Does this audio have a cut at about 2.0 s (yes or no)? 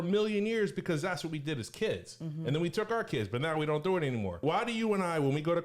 no